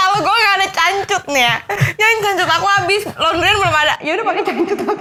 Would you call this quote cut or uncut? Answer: uncut